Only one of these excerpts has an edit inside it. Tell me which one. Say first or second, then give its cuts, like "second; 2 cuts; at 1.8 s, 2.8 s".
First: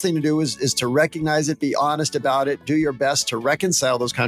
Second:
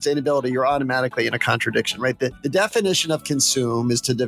second; 1 cut; at 2.4 s